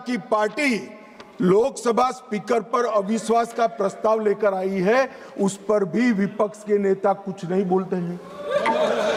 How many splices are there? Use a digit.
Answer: 0